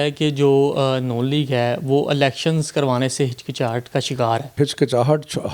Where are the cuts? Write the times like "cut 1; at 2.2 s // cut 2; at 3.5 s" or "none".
cut 1; at 4.5 s

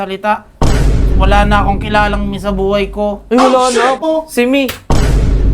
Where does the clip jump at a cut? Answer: cut 1; at 4.0 s

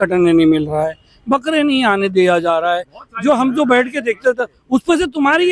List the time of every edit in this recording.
none

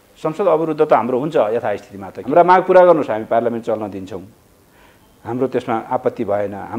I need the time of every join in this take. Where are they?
cut 1; at 2.2 s

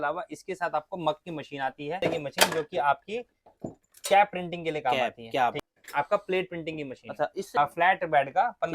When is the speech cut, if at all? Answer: cut 1; at 2.0 s // cut 2; at 5.6 s // cut 3; at 7.5 s

